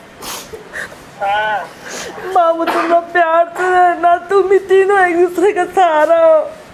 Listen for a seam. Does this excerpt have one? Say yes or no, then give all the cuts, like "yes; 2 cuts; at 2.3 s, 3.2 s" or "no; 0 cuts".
no; 0 cuts